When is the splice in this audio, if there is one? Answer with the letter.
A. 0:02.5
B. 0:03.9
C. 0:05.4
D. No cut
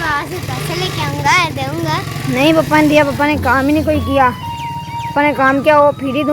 D